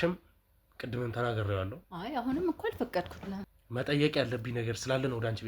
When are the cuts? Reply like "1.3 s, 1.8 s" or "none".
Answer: 1.8 s, 3.5 s